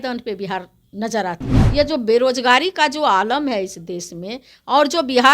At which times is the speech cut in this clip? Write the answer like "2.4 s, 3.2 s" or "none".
1.6 s